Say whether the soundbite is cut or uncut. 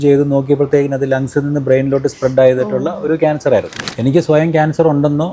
cut